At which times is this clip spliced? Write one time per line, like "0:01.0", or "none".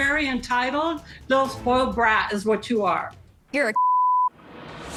none

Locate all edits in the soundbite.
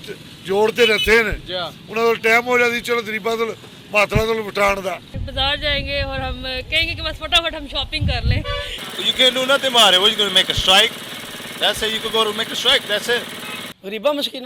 0:05.2
0:08.9
0:13.3

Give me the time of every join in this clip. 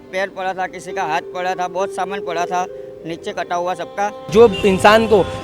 0:04.2

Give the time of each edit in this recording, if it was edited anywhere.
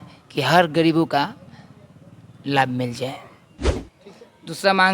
0:03.9

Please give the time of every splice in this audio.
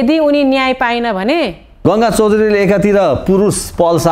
0:01.8

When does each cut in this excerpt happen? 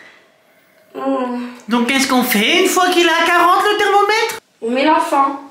0:04.5

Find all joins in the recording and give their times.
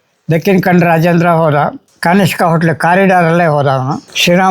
0:01.8

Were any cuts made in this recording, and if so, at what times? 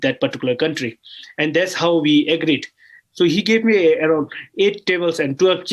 none

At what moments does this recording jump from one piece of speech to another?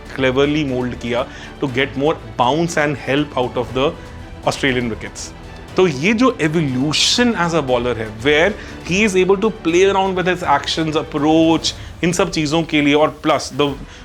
none

